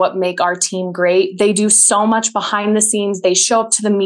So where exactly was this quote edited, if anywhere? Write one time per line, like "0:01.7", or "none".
none